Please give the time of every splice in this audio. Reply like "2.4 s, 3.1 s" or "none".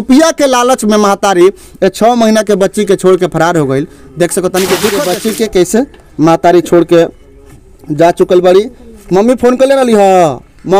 5.0 s